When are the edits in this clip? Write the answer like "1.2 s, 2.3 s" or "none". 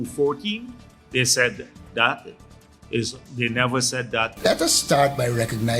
4.3 s

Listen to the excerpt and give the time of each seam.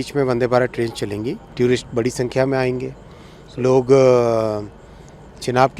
1.4 s

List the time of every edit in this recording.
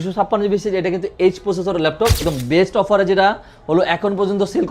2.2 s

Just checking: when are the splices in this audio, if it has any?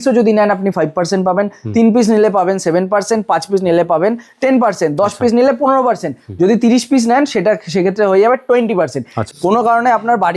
9.1 s

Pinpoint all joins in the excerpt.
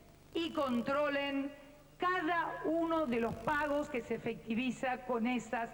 none

